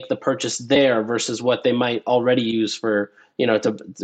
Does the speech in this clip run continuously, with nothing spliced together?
yes; 0 cuts

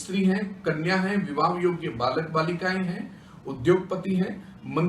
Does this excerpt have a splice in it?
no; 0 cuts

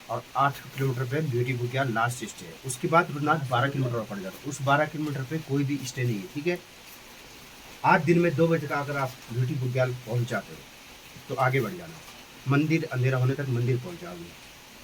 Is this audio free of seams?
yes; 0 cuts

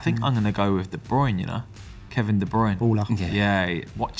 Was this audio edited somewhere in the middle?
no; 0 cuts

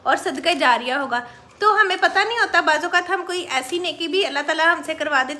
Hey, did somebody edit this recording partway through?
no; 0 cuts

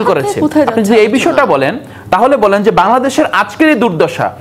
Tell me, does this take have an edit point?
no; 0 cuts

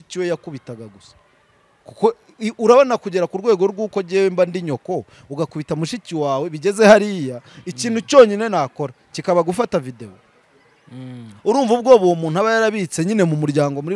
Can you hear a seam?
no; 0 cuts

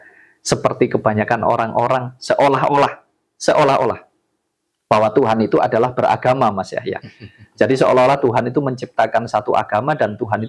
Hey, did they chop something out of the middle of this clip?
no; 0 cuts

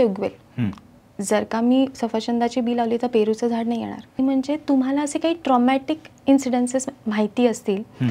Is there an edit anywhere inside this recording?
yes; 1 cut; at 4.2 s

